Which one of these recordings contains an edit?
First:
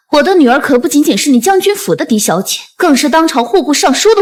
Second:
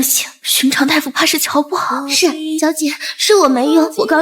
second; 1 cut; at 2.5 s

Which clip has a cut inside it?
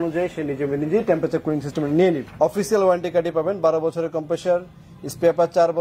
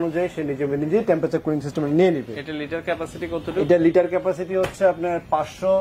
first; 1 cut; at 2.3 s

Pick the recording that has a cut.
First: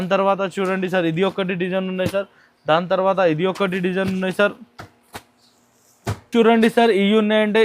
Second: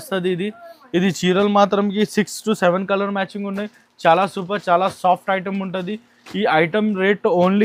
first; 1 cut; at 6.1 s

